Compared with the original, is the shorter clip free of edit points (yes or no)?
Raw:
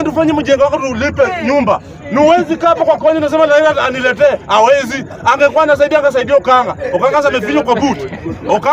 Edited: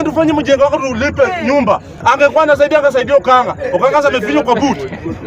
no